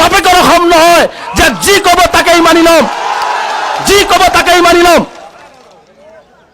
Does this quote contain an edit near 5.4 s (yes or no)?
no